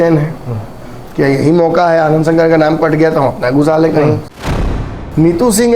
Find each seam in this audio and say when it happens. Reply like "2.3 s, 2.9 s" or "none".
4.8 s